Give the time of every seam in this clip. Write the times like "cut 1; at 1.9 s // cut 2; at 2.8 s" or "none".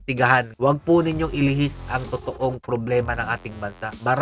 none